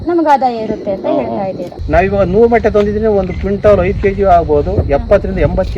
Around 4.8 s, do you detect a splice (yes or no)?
no